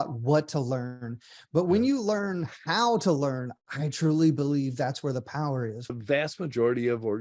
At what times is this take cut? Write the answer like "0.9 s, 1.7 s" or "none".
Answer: 5.9 s